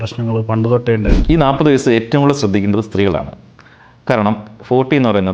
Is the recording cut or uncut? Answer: cut